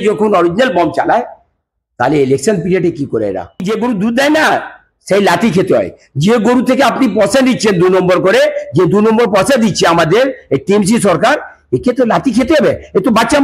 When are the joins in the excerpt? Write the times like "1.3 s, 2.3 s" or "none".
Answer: 3.6 s